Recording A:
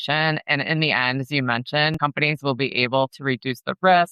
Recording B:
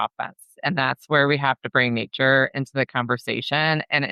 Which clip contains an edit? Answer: A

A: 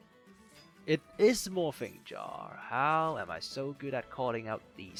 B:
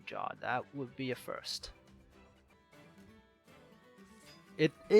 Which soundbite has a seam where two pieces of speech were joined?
B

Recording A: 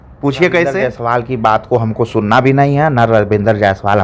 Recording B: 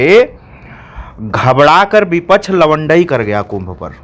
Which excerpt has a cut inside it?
A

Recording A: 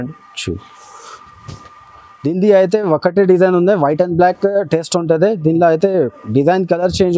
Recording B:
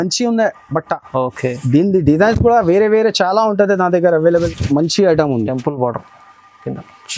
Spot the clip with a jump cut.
B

